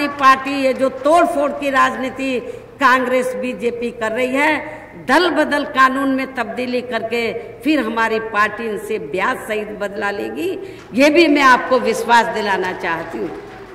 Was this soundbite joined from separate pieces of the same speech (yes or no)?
no